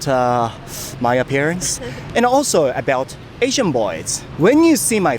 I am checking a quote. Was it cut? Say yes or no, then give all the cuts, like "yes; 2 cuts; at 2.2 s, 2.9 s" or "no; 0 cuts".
yes; 1 cut; at 4.1 s